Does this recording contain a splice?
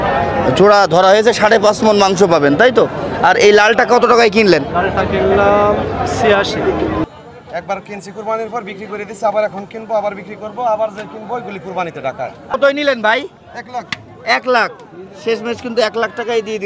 yes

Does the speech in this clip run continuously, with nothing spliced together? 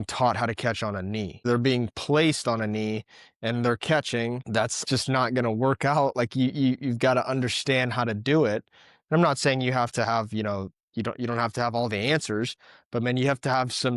no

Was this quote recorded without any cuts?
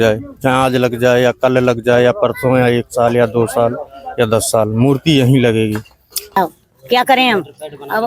no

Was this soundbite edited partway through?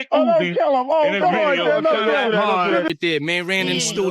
yes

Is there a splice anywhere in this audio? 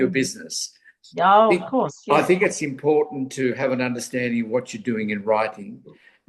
no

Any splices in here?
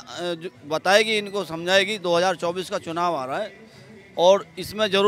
no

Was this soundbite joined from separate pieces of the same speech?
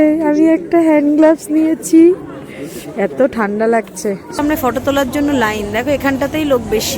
yes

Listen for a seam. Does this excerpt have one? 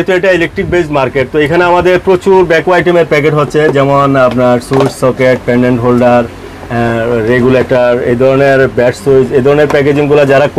no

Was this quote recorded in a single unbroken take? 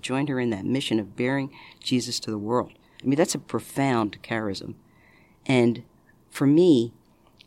yes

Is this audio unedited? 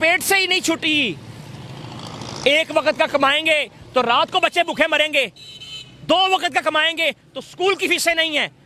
yes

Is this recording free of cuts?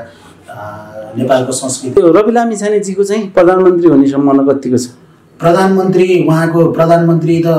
no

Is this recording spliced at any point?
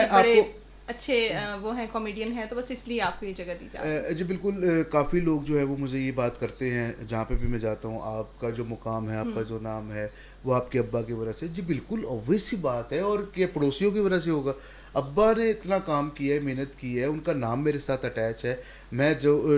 no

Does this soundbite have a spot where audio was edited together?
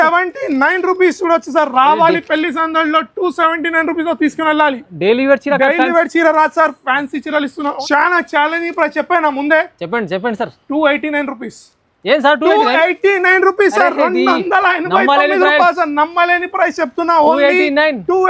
yes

